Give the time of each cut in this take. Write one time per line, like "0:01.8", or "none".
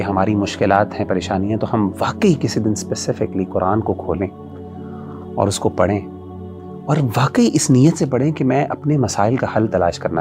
none